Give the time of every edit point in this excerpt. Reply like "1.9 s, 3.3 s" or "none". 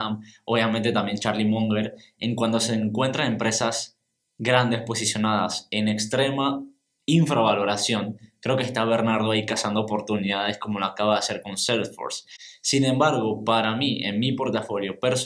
none